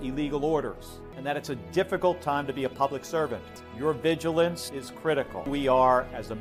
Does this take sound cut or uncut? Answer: cut